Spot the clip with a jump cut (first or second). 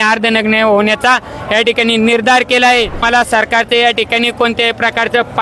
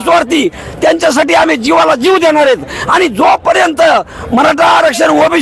first